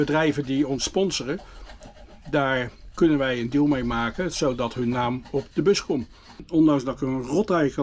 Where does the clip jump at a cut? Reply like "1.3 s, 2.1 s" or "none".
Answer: 6.5 s

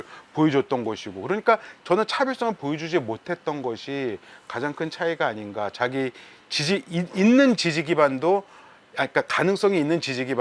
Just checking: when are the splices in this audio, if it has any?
none

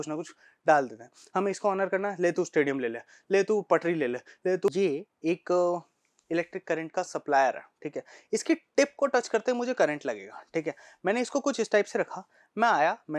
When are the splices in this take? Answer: 4.7 s

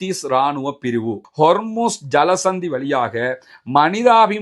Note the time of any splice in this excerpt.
1.2 s

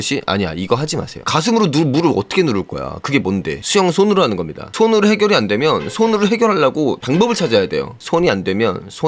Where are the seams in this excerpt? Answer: 1.1 s, 3.6 s, 7.9 s

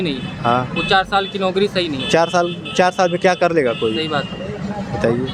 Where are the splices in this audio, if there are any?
none

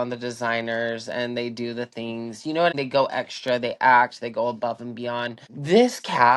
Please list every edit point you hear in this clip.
2.7 s, 5.5 s

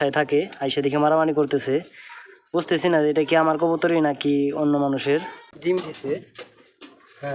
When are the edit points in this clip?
5.4 s

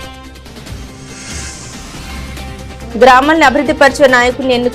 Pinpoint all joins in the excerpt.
0.8 s, 2.6 s

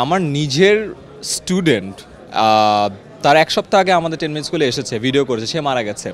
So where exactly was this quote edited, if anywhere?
none

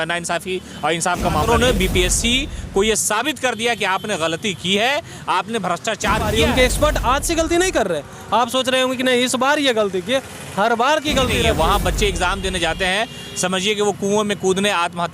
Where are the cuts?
1.4 s, 6.2 s, 11.5 s

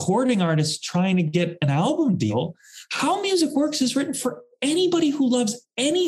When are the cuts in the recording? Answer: 2.3 s

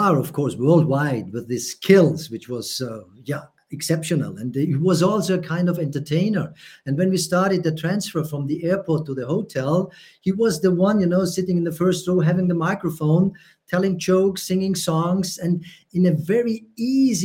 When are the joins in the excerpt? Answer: none

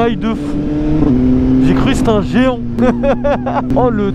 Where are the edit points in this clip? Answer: none

